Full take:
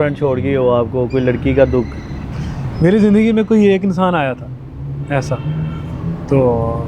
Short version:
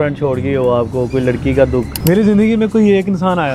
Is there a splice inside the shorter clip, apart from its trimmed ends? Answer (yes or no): yes